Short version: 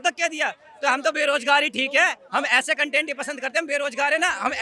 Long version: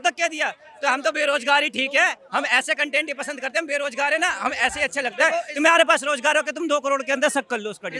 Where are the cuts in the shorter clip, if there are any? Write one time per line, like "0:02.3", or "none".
none